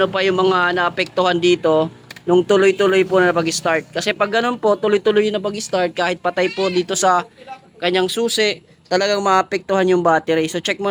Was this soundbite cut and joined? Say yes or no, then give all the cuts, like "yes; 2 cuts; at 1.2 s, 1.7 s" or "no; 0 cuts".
no; 0 cuts